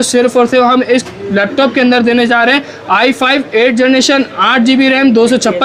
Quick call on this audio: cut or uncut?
uncut